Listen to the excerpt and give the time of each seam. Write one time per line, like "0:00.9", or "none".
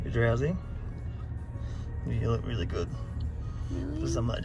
none